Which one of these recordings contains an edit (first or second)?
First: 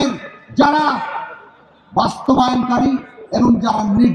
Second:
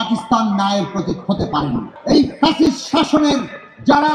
second